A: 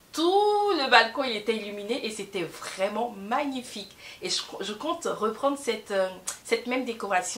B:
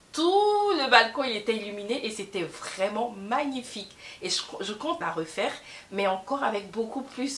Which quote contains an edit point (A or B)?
B